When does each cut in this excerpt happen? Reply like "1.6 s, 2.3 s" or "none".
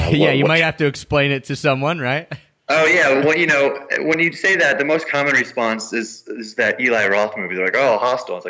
none